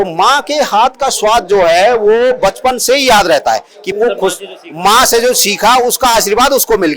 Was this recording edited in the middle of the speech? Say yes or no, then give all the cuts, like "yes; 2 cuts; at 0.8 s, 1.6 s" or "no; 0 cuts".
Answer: yes; 1 cut; at 3.9 s